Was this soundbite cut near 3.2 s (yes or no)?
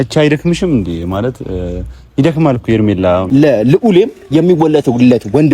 yes